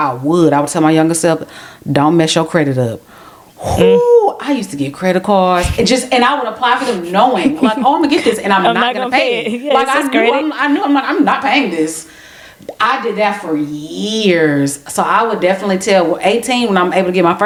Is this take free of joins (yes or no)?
yes